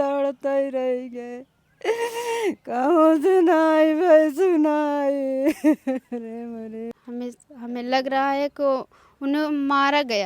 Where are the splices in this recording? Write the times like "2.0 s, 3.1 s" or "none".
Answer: 6.9 s